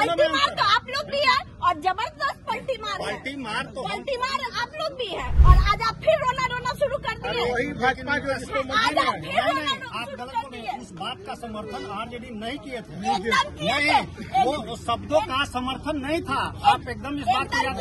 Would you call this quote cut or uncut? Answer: cut